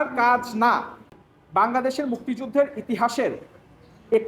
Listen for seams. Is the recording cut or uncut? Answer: cut